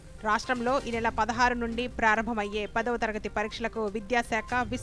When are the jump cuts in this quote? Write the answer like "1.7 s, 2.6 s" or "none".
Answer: none